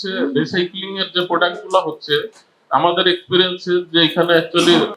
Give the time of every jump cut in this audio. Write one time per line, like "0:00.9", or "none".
none